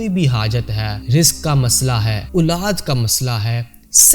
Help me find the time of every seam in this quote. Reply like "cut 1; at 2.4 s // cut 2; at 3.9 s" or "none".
cut 1; at 0.9 s // cut 2; at 2.2 s